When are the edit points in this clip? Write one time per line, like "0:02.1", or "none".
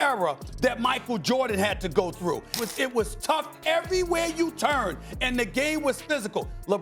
0:02.5